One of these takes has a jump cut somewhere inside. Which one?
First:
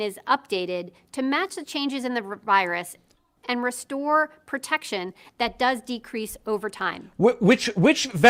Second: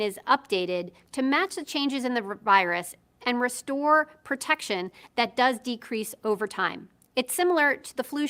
second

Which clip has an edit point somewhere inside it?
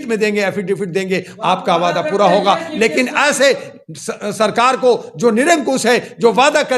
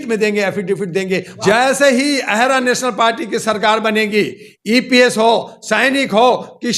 second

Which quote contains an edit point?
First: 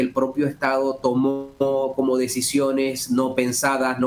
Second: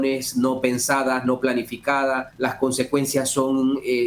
second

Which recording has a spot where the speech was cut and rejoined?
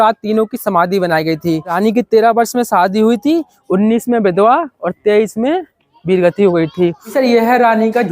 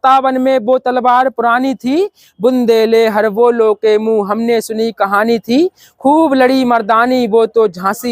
first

